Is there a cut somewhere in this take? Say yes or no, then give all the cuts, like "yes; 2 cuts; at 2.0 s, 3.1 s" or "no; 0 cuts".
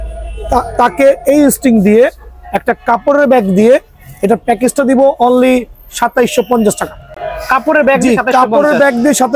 no; 0 cuts